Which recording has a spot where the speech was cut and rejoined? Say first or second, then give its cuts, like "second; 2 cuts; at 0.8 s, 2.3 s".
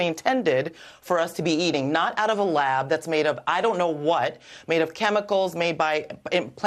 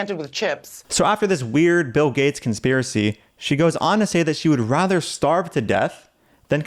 second; 1 cut; at 0.9 s